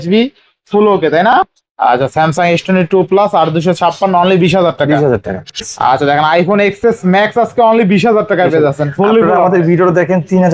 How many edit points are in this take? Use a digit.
2